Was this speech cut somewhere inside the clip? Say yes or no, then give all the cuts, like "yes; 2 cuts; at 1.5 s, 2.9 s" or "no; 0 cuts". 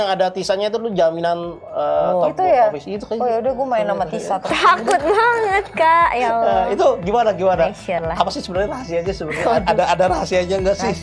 no; 0 cuts